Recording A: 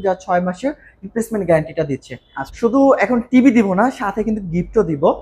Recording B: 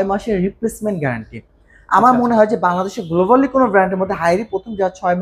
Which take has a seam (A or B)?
A